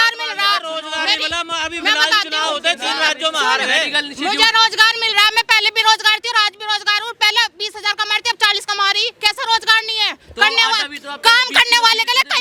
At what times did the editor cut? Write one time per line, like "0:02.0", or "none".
none